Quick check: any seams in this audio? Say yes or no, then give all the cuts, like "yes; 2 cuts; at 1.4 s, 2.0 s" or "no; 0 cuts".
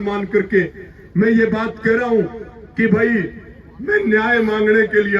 no; 0 cuts